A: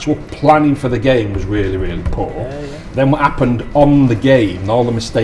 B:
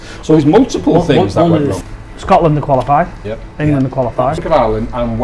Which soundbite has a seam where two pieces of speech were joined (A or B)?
B